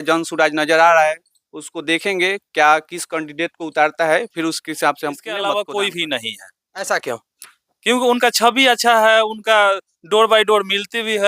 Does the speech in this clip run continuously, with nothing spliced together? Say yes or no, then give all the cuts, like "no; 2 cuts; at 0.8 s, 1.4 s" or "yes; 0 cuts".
no; 1 cut; at 5.3 s